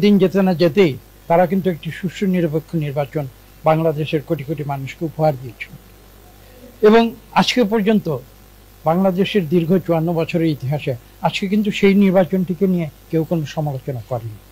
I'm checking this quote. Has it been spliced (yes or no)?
no